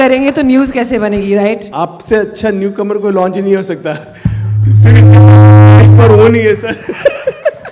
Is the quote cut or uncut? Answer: cut